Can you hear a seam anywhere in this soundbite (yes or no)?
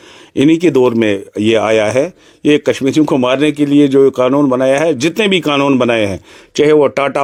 no